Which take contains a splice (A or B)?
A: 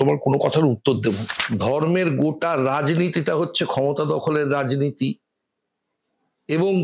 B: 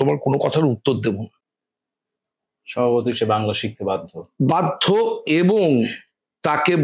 A